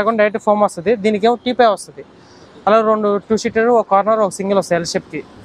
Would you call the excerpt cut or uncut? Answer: uncut